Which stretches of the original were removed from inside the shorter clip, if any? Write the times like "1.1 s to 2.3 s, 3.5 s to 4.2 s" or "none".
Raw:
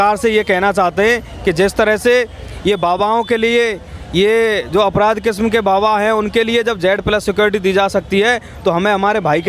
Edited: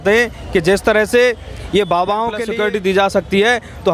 3.4 s to 7.2 s